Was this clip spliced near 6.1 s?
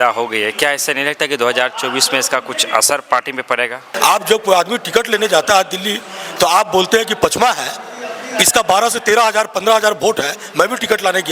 no; 1 cut; at 3.8 s

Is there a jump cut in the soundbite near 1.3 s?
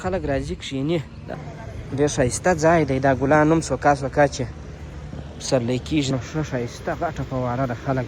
yes; 2 cuts; at 1.3 s, 6.1 s

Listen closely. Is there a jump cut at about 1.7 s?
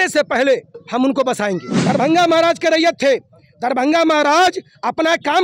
yes; 1 cut; at 1.7 s

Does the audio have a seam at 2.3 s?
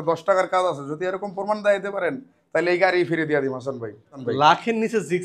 no; 1 cut; at 4.1 s

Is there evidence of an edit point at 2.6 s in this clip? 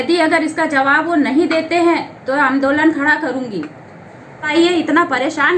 no; 1 cut; at 4.4 s

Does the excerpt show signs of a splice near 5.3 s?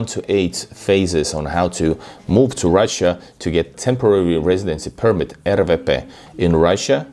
no; 1 cut; at 3.7 s

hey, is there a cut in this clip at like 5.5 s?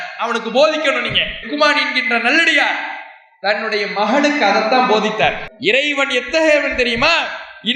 yes; 1 cut; at 5.5 s

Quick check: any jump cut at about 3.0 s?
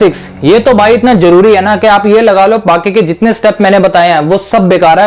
no; 0 cuts

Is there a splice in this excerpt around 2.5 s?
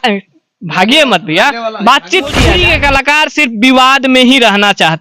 yes; 1 cut; at 2.5 s

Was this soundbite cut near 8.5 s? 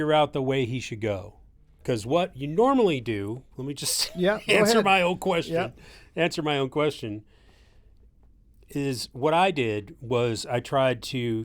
no; 1 cut; at 1.8 s

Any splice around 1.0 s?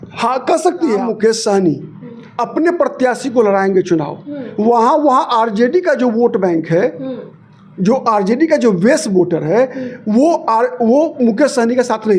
yes; 1 cut; at 1.0 s

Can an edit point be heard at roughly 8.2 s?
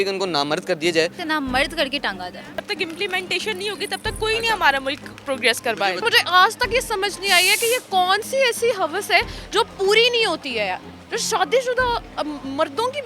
no; 3 cuts; at 1.2 s, 2.6 s, 6.0 s

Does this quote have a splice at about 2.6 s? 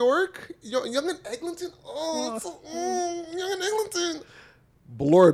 no; 0 cuts

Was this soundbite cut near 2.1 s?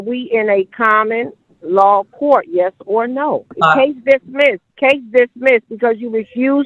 no; 2 cuts; at 3.5 s, 4.7 s

